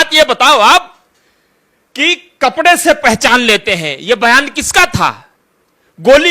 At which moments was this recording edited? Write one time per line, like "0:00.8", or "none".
none